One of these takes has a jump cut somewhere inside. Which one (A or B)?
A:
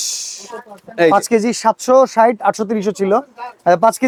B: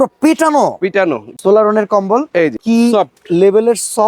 B